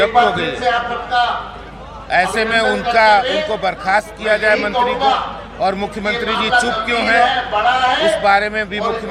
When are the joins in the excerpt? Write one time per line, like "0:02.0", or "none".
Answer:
none